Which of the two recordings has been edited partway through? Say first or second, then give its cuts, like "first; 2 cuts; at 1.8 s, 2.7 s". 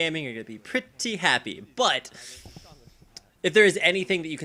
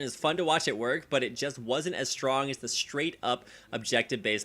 second; 1 cut; at 2.0 s